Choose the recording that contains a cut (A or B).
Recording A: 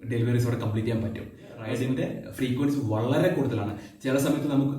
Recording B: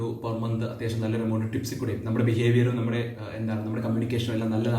A